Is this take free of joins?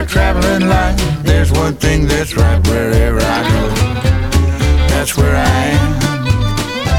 yes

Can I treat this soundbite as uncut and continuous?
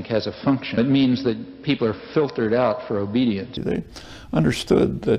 no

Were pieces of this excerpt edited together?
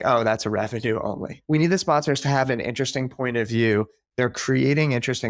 yes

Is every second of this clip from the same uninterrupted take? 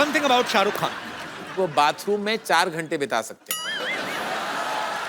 no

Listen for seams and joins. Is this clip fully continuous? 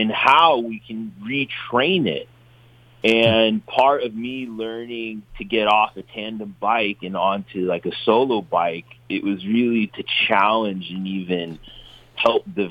yes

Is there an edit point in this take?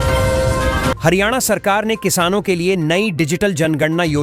no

